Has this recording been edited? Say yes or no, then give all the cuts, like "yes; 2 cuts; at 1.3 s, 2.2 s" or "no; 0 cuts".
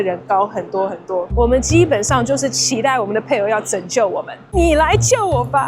yes; 2 cuts; at 1.3 s, 4.6 s